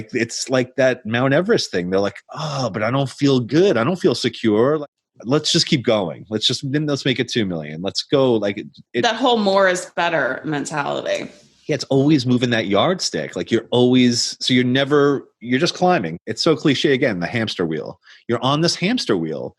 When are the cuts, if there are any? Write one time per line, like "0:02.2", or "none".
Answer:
0:04.8
0:16.1